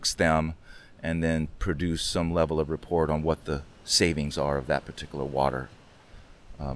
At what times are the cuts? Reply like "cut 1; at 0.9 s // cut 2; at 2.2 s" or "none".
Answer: none